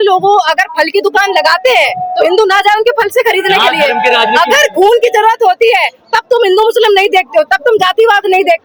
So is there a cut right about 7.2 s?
no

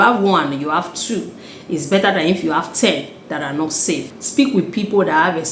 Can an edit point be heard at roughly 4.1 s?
yes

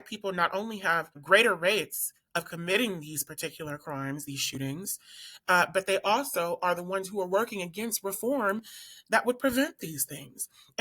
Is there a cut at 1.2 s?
yes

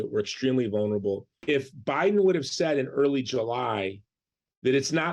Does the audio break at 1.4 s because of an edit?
yes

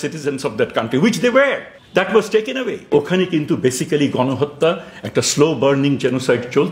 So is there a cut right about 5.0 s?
no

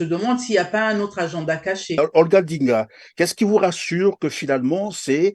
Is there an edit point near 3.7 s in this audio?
no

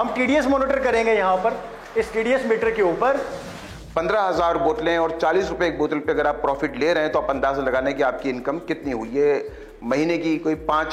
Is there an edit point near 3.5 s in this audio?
yes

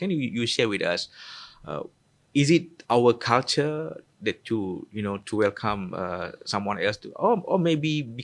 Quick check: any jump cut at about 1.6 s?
no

